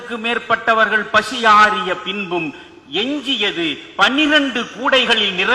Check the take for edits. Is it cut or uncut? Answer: uncut